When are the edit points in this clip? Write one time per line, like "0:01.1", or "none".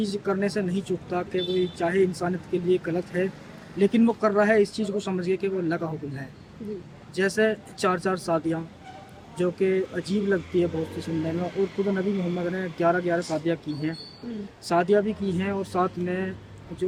none